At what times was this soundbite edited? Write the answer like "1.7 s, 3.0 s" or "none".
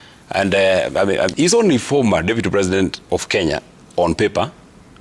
1.3 s